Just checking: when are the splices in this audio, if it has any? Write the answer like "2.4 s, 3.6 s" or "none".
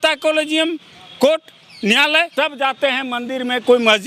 2.3 s